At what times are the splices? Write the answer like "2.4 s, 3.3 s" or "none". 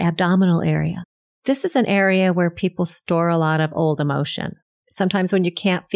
0.9 s, 4.6 s